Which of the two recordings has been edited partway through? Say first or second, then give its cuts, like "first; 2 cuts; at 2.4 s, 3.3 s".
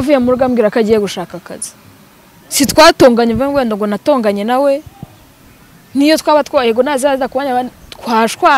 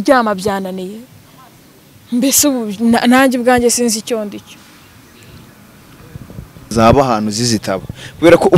second; 1 cut; at 6.7 s